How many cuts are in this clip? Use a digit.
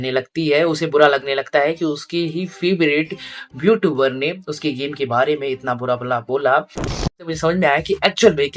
1